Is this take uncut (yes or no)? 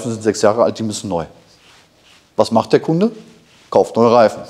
yes